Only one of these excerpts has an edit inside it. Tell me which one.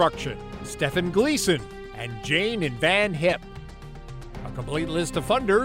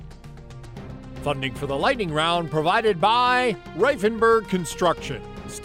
second; 1 cut; at 1.2 s

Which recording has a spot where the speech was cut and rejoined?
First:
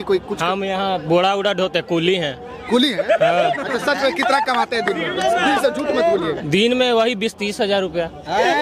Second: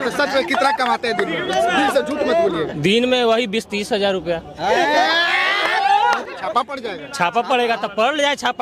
second; 1 cut; at 6.3 s

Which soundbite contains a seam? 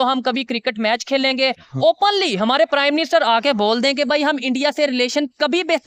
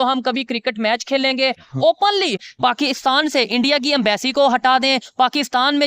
second; 1 cut; at 2.4 s

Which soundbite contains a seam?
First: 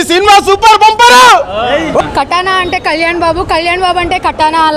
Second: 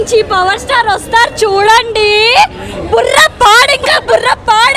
first; 1 cut; at 2.0 s

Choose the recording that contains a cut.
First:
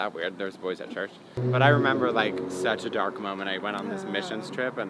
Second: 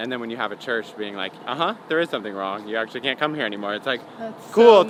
first; 1 cut; at 1.4 s

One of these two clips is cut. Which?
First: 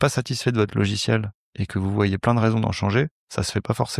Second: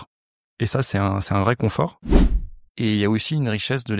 second; 1 cut; at 2.2 s

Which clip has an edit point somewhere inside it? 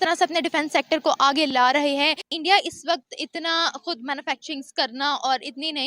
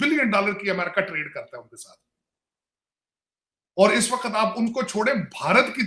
first; 1 cut; at 2.2 s

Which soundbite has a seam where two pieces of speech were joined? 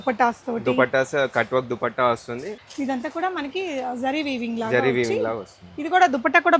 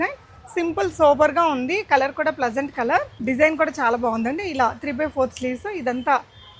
second; 1 cut; at 3.1 s

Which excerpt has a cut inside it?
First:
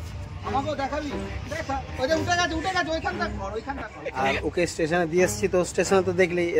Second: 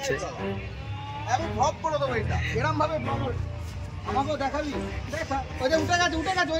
first; 1 cut; at 4.0 s

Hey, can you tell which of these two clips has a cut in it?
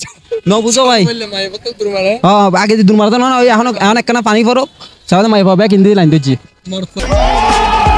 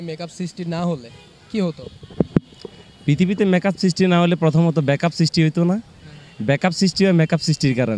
first; 1 cut; at 7.0 s

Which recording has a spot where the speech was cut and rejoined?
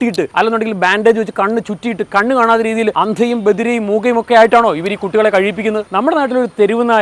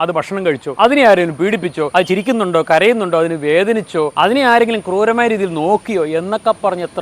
first; 1 cut; at 5.9 s

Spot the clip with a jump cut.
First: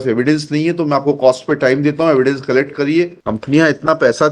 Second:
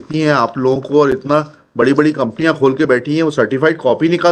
first; 1 cut; at 3.2 s

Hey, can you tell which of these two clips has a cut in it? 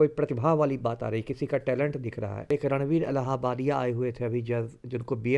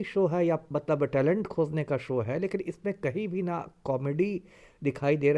first; 1 cut; at 2.5 s

